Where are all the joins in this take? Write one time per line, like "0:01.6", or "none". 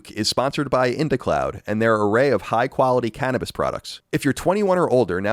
0:03.9